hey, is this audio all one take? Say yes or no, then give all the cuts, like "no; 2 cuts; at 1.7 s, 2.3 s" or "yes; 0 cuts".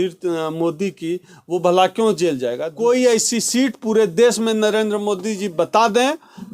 no; 1 cut; at 2.7 s